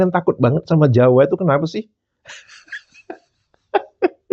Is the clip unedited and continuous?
yes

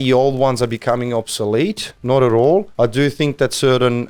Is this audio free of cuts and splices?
no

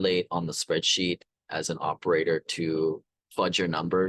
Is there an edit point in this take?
no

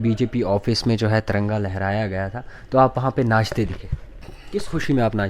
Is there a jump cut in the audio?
yes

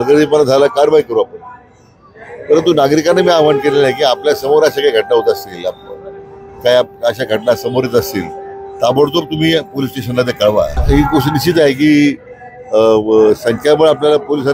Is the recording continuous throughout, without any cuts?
no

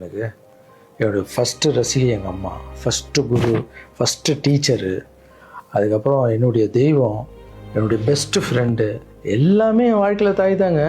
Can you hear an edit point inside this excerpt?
no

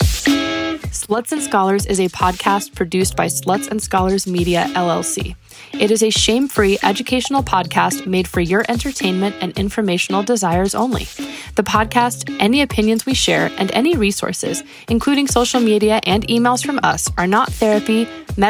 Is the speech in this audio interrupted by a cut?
yes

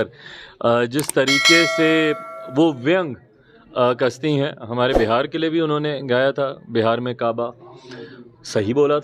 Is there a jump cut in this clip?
no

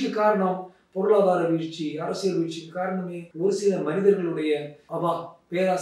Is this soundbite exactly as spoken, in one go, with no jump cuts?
no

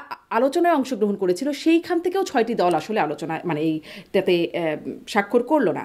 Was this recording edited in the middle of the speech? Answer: no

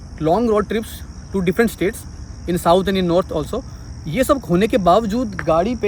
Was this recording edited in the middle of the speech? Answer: no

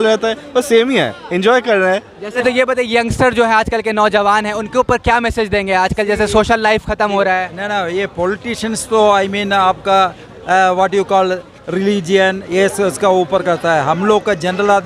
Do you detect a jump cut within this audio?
yes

